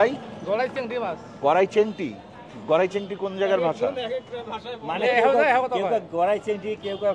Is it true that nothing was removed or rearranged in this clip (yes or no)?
yes